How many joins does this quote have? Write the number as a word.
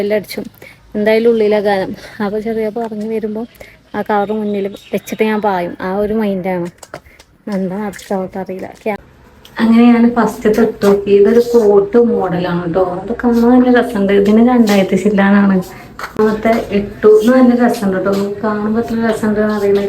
two